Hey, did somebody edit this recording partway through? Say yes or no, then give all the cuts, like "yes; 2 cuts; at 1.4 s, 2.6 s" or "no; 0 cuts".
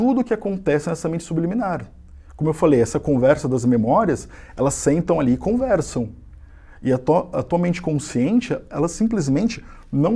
no; 0 cuts